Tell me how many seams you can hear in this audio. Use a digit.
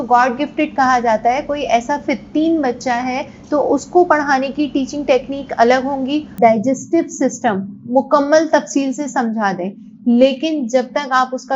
1